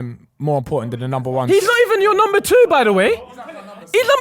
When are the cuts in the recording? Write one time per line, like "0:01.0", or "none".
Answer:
none